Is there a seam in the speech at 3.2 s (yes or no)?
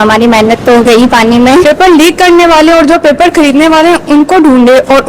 no